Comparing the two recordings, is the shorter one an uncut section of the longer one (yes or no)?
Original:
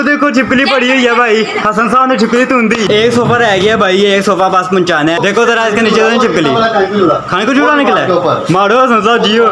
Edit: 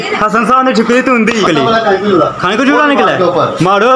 no